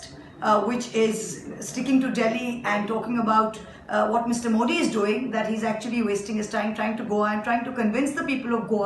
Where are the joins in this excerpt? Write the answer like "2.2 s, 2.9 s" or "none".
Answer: none